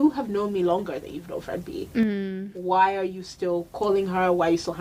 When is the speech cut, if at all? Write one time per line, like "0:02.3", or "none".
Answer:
none